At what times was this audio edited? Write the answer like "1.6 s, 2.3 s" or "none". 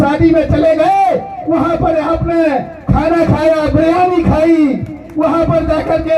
none